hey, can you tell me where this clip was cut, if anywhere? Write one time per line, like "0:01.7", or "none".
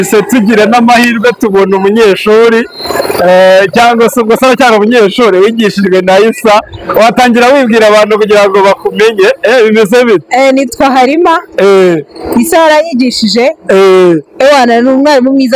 none